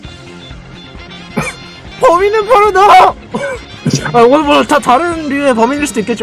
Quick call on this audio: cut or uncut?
uncut